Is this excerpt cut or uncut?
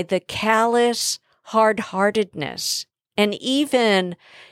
uncut